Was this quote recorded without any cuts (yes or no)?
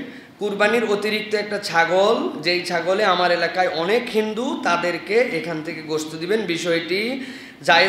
yes